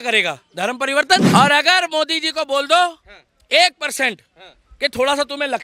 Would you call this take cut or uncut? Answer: cut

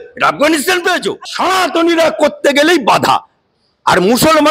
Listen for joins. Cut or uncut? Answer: cut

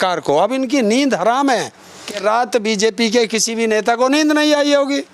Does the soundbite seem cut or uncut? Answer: cut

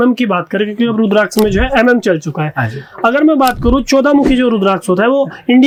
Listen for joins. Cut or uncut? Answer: uncut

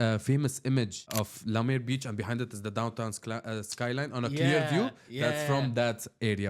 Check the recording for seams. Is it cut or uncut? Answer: cut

